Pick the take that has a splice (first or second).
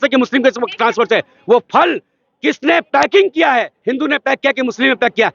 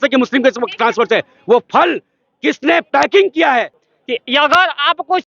second